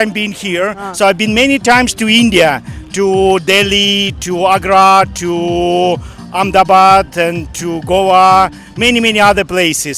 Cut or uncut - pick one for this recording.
uncut